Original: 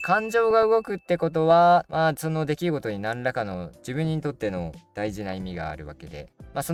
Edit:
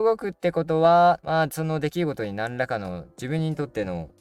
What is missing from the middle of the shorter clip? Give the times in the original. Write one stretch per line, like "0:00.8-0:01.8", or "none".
none